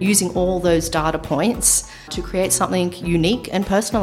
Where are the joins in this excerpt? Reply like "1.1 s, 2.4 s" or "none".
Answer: 2.1 s